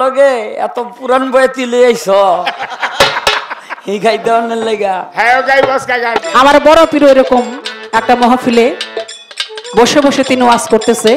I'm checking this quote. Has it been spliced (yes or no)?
yes